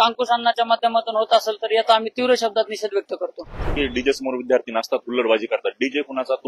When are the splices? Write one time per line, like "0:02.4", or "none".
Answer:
0:03.7